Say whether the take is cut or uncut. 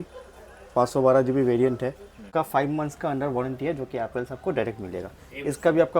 cut